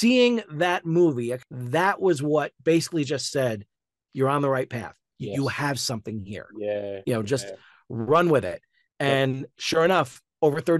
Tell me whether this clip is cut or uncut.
cut